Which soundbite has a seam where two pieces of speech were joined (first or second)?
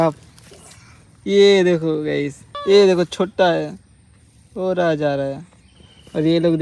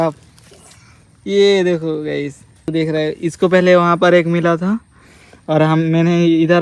second